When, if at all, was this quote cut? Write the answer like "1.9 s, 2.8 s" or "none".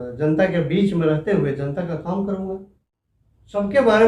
2.6 s